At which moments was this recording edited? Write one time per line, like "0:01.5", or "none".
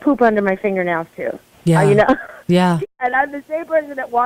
0:02.8